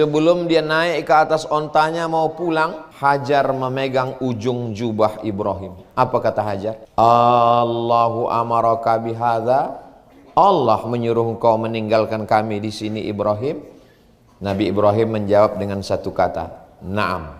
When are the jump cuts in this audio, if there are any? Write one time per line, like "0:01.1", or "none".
0:02.8
0:06.8